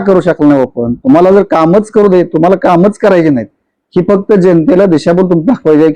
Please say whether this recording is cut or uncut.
uncut